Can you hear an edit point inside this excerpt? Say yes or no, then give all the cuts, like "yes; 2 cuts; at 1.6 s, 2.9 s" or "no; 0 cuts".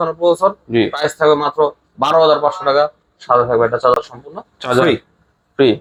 no; 0 cuts